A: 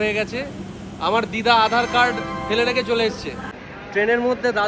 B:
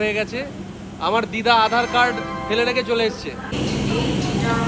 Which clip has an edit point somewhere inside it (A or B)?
A